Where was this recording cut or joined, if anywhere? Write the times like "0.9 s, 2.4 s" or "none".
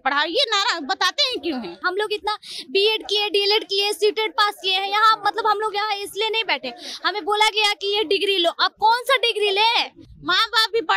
1.8 s, 10.0 s